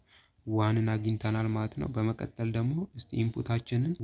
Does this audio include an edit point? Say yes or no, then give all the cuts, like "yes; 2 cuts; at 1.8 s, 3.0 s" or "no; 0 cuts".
no; 0 cuts